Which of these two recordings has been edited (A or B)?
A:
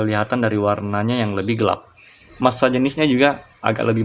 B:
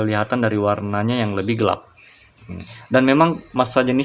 A